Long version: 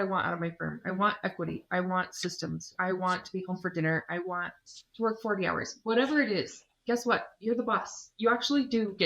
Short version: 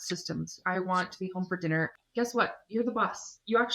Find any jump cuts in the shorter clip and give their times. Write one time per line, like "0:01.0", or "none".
0:02.0